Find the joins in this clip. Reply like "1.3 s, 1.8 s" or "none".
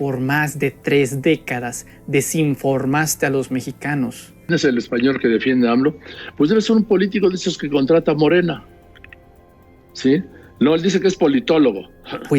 4.5 s